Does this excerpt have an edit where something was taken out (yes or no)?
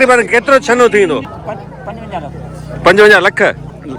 yes